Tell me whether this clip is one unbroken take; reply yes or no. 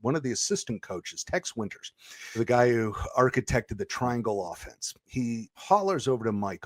no